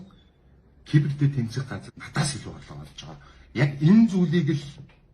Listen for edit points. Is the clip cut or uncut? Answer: cut